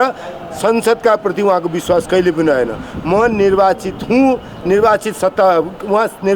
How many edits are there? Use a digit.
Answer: 0